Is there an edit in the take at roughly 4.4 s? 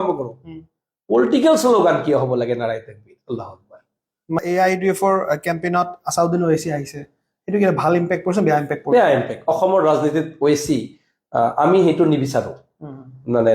yes; 1 cut; at 4.4 s

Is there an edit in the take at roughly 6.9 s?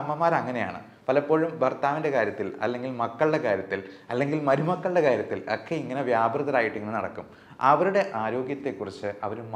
no; 0 cuts

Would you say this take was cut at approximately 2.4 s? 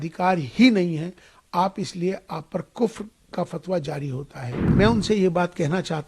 no; 1 cut; at 4.7 s

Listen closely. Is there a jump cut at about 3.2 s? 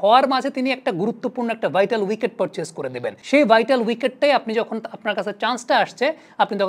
yes; 1 cut; at 3.2 s

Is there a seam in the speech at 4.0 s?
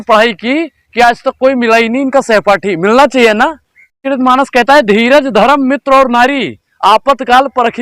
yes; 1 cut; at 4.0 s

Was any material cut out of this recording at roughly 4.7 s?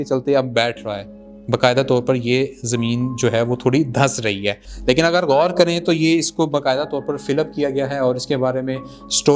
yes; 1 cut; at 4.7 s

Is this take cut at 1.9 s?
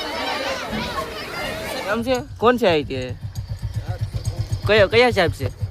yes; 1 cut; at 1.9 s

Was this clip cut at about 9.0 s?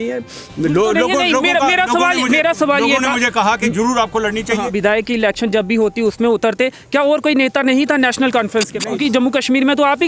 yes; 2 cuts; at 4.7 s, 9.0 s

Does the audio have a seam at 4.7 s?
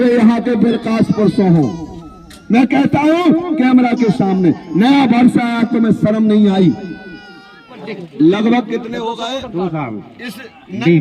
no; 1 cut; at 7.8 s

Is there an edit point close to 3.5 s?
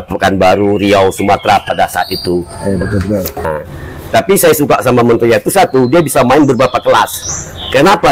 yes; 1 cut; at 3.5 s

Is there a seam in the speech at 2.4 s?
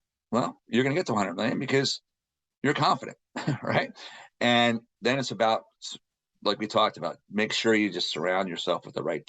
no; 1 cut; at 4.9 s

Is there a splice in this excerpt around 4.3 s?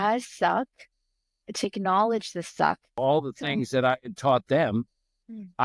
no; 2 cuts; at 1.6 s, 2.9 s

